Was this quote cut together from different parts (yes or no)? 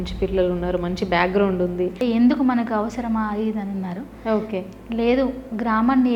yes